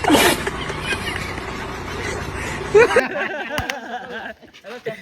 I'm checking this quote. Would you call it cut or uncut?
cut